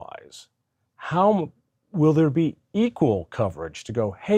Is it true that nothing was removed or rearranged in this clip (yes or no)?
yes